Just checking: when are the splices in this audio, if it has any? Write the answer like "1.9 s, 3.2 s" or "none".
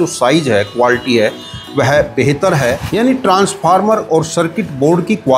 2.9 s